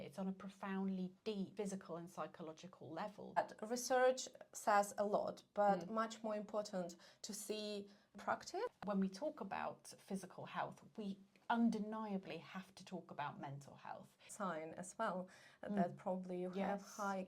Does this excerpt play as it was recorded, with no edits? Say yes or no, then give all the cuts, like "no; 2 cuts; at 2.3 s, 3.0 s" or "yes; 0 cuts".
no; 4 cuts; at 1.5 s, 3.4 s, 8.2 s, 14.2 s